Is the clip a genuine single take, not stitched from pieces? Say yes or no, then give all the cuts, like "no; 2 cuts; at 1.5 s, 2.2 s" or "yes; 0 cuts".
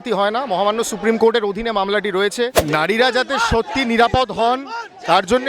no; 1 cut; at 2.6 s